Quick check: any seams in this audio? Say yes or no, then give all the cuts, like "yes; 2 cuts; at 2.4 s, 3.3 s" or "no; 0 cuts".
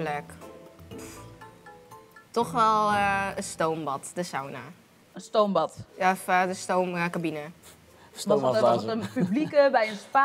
no; 0 cuts